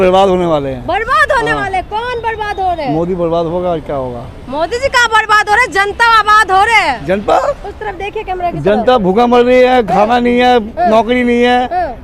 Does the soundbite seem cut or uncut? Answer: uncut